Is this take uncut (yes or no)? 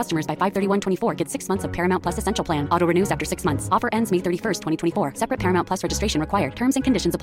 yes